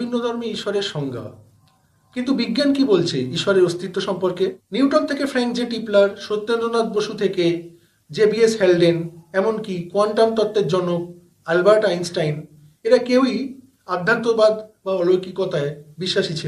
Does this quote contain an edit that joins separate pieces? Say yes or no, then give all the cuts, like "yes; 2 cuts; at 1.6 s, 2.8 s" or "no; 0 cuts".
yes; 1 cut; at 4.6 s